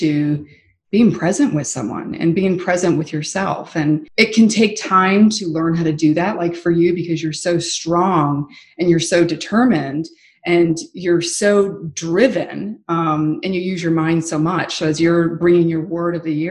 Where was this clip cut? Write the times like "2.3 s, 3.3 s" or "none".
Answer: 4.1 s